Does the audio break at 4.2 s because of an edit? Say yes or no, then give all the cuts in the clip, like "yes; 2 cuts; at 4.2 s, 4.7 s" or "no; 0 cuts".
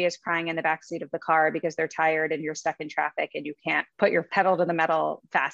yes; 1 cut; at 4.2 s